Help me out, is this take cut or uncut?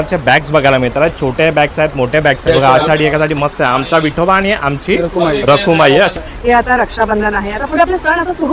cut